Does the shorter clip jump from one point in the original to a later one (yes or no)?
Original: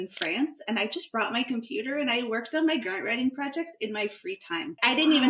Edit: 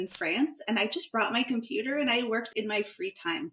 yes